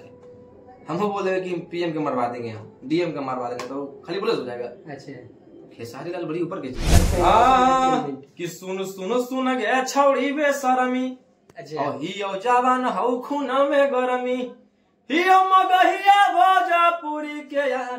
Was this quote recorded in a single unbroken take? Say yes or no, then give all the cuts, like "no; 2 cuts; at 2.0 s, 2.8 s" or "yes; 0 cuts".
no; 1 cut; at 6.9 s